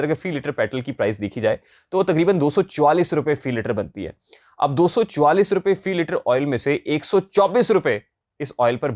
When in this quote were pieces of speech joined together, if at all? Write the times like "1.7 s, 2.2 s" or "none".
none